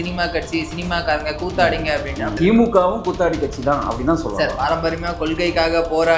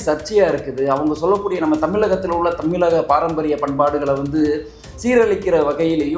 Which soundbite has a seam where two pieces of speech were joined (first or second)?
first